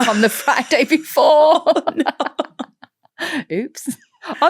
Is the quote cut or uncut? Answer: uncut